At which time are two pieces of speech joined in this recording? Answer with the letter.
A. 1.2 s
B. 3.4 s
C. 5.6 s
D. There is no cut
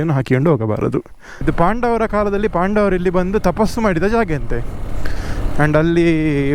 A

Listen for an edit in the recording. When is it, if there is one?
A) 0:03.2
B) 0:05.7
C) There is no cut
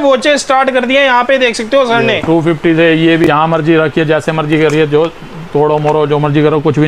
A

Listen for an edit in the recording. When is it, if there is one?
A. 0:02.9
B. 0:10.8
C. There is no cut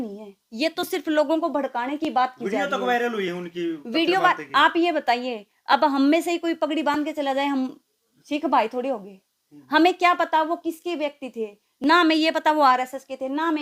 C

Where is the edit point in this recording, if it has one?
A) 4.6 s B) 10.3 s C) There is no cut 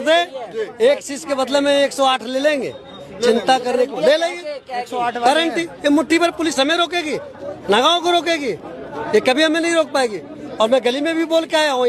C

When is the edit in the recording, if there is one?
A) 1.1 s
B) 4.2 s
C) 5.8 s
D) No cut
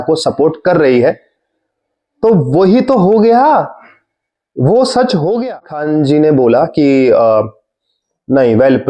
C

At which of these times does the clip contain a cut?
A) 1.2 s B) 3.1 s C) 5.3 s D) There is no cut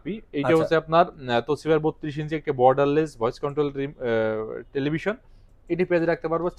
D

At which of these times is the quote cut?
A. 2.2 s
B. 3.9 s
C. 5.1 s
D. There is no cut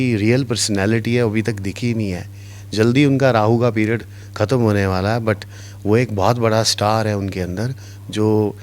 D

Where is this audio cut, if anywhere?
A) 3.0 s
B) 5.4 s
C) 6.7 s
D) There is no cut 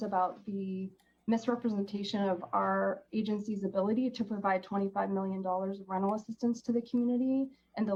D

